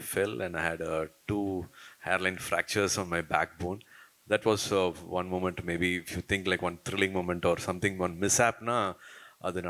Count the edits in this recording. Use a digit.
0